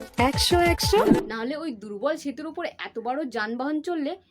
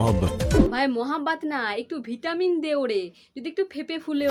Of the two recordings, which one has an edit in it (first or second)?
first